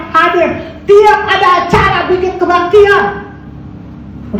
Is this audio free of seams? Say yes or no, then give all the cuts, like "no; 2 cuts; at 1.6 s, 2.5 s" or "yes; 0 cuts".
yes; 0 cuts